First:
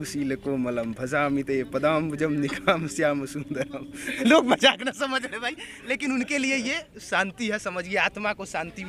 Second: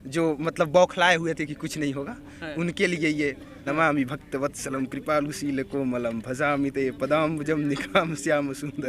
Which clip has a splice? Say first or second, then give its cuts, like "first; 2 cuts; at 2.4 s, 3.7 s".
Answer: second; 1 cut; at 3.5 s